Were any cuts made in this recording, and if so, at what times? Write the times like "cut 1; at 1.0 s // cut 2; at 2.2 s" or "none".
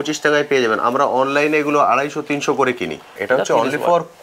cut 1; at 3.2 s

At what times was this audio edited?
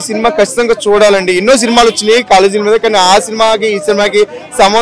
none

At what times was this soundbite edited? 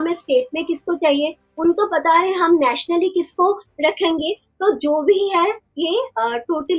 none

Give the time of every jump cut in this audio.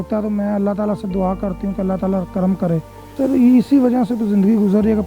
cut 1; at 3.0 s

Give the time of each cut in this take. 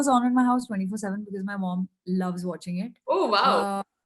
none

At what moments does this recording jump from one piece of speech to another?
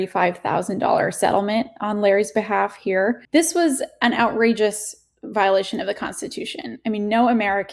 cut 1; at 3.2 s

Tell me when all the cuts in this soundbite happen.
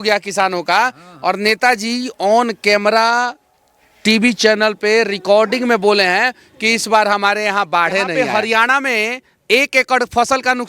cut 1; at 8.4 s

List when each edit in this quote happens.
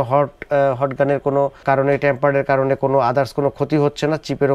none

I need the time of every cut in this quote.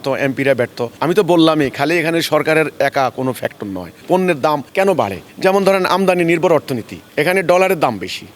cut 1; at 4.0 s

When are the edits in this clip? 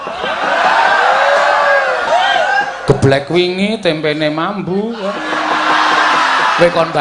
cut 1; at 2.1 s

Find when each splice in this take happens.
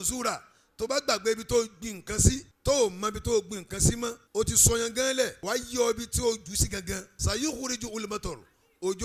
cut 1; at 2.5 s // cut 2; at 4.2 s // cut 3; at 5.4 s // cut 4; at 7.1 s

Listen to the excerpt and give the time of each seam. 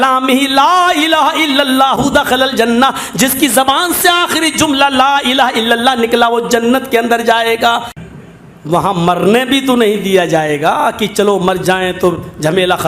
cut 1; at 8.0 s

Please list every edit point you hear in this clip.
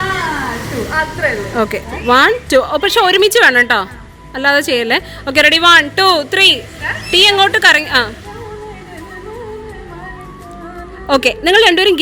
none

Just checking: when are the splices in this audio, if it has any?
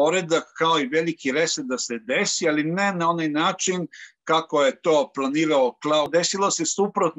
cut 1; at 6.1 s

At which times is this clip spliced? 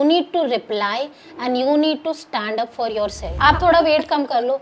cut 1; at 3.2 s

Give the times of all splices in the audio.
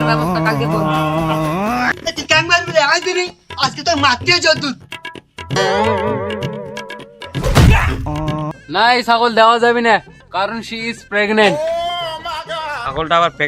cut 1; at 1.9 s // cut 2; at 8.5 s

